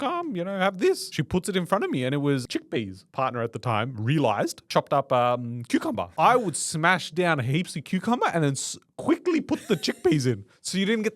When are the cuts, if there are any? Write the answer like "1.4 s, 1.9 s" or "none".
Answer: 1.1 s, 2.5 s, 4.6 s, 6.1 s